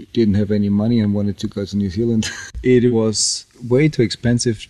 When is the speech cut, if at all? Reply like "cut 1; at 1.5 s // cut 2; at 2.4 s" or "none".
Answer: cut 1; at 2.4 s